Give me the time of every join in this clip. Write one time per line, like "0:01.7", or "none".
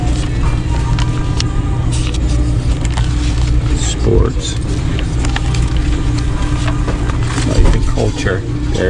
0:01.4
0:05.5